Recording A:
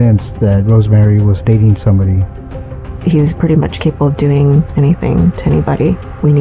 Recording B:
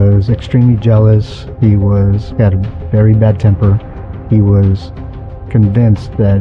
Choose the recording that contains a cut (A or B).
A